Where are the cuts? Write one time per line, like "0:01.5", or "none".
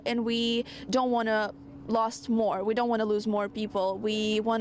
none